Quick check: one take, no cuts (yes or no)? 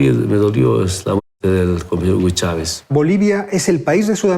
no